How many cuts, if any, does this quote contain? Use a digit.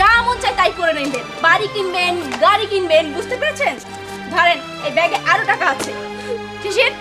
0